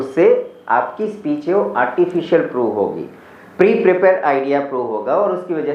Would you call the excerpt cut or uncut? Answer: uncut